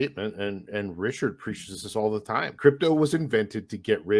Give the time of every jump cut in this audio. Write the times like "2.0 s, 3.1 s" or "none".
2.5 s